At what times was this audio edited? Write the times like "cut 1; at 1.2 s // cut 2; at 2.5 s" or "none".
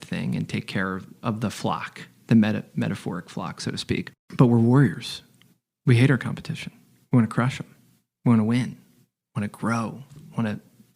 cut 1; at 4.2 s